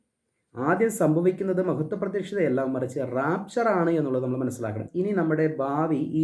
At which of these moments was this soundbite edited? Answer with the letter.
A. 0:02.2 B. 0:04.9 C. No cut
B